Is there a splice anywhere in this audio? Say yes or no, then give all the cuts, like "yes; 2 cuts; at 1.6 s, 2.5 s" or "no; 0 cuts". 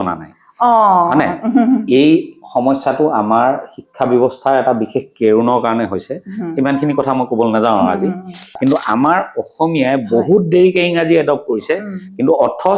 yes; 1 cut; at 8.5 s